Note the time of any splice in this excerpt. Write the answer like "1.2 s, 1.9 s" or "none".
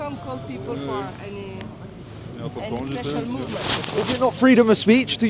none